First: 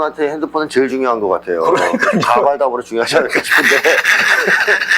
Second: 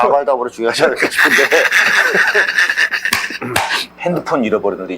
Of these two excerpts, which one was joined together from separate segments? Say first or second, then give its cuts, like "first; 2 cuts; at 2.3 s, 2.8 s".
second; 1 cut; at 3.8 s